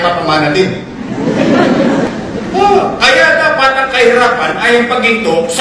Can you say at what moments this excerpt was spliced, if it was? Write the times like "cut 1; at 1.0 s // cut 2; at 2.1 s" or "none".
cut 1; at 2.1 s